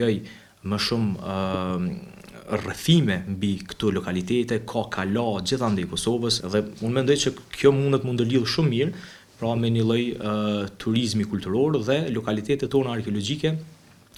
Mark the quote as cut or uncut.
uncut